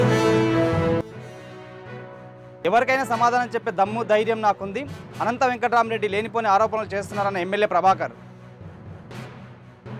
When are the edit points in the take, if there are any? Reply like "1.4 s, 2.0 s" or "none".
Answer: 1.0 s

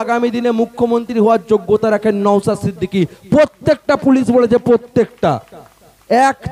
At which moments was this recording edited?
none

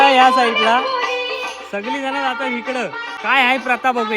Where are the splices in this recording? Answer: 3.1 s

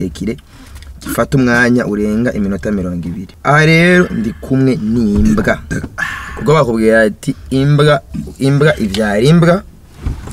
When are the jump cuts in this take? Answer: 3.2 s

